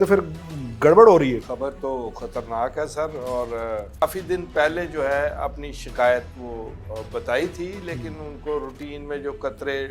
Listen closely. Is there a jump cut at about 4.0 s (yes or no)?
yes